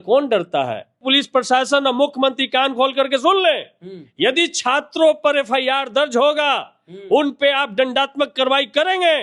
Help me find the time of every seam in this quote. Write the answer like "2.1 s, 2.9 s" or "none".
1.0 s